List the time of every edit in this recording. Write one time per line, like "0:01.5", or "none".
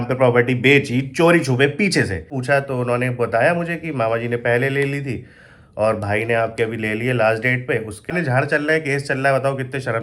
0:02.3
0:08.1